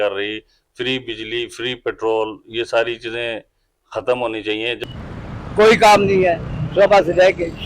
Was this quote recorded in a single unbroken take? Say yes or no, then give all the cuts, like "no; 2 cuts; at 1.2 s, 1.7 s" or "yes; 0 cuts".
no; 1 cut; at 4.8 s